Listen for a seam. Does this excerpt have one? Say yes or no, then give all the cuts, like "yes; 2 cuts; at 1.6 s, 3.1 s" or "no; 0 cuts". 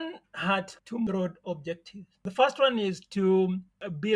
yes; 1 cut; at 0.9 s